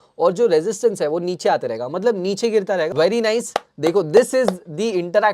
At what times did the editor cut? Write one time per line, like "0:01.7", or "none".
0:02.9